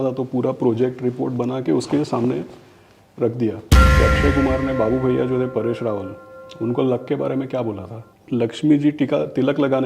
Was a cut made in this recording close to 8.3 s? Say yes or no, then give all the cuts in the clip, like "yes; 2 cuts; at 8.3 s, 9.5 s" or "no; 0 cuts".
yes; 2 cuts; at 4.0 s, 8.3 s